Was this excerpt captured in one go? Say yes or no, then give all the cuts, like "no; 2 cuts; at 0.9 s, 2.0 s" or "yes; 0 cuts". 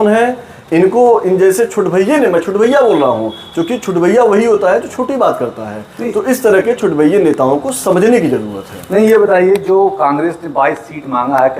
yes; 0 cuts